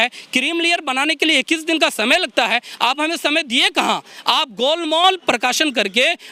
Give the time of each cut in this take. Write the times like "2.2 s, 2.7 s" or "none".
none